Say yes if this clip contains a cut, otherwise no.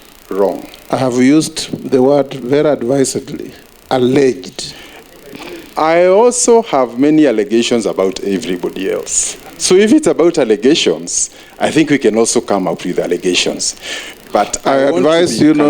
no